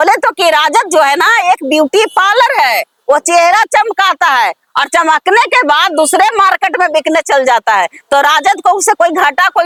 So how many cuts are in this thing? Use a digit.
0